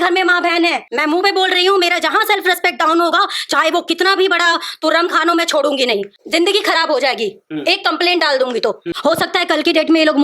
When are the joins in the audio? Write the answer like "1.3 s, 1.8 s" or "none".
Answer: 0.9 s, 6.2 s, 8.9 s

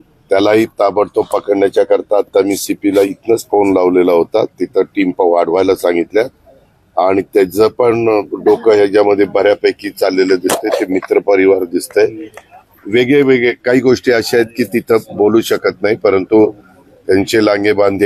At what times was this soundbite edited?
none

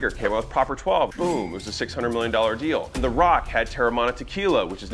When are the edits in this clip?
1.1 s, 3.0 s

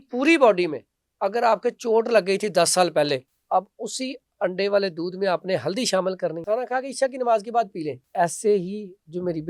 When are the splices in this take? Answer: 3.3 s, 6.4 s, 8.0 s

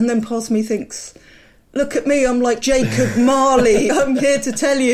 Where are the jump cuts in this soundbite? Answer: 2.6 s, 3.9 s

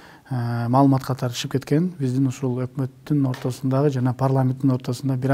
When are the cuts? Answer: none

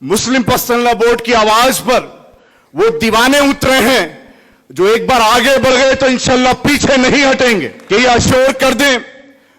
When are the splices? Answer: 7.8 s

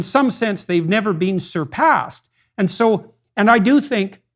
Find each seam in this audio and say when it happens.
none

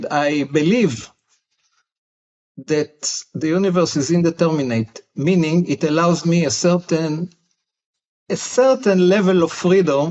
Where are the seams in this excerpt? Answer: none

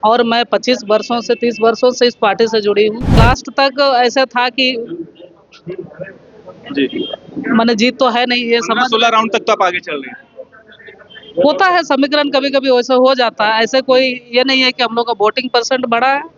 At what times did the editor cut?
3.2 s

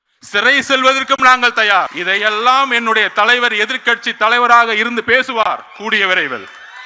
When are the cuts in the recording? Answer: 2.0 s

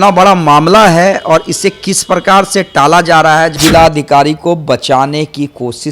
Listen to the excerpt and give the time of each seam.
3.6 s

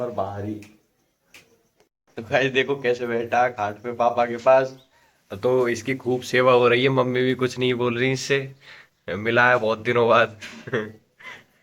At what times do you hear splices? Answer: 2.0 s

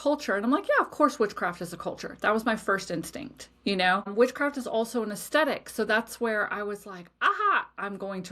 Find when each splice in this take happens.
4.1 s

